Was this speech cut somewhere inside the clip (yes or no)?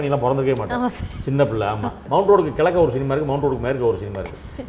yes